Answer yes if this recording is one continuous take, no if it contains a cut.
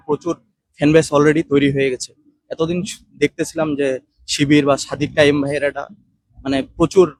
yes